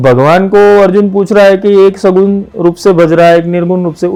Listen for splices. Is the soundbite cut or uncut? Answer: uncut